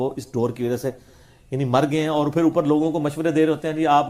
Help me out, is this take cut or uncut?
uncut